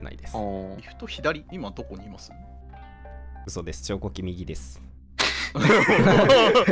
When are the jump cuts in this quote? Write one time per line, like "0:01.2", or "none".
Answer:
0:00.9
0:01.5